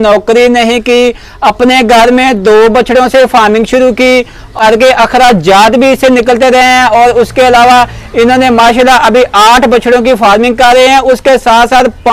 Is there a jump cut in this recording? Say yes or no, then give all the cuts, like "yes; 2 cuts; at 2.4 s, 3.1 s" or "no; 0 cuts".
yes; 1 cut; at 4.6 s